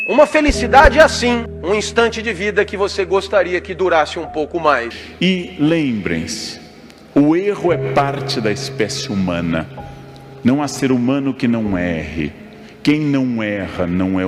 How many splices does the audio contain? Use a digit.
2